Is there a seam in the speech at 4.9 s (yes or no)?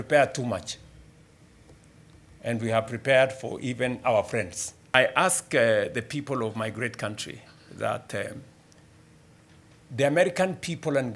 yes